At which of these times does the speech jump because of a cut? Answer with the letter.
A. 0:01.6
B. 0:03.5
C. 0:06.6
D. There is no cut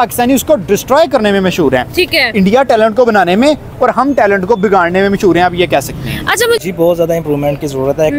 C